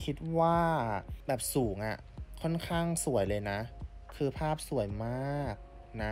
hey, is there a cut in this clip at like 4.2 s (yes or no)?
no